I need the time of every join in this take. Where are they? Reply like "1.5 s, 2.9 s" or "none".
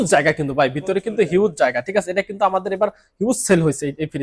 none